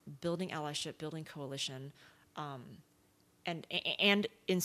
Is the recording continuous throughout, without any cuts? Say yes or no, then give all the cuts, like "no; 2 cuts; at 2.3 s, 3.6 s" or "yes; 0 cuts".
yes; 0 cuts